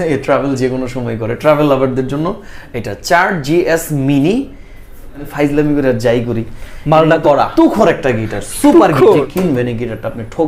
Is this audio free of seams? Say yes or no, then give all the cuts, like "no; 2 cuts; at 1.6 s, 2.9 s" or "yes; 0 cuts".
no; 2 cuts; at 5.3 s, 9.3 s